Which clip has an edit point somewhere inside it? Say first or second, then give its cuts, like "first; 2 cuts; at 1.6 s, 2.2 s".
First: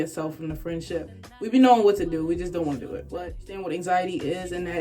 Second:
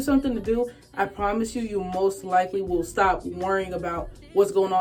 first; 2 cuts; at 1.2 s, 3.5 s